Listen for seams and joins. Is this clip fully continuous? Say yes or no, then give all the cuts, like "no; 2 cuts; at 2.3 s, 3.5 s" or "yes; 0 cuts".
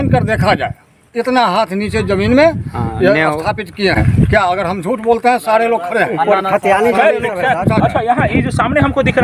yes; 0 cuts